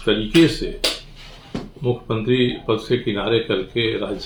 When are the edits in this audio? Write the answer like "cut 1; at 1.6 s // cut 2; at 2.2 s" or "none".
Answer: none